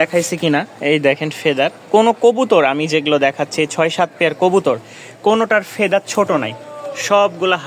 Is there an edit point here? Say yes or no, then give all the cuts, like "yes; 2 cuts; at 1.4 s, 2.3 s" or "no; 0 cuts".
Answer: no; 0 cuts